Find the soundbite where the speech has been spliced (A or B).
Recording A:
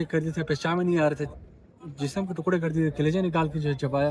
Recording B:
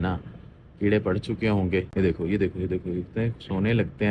B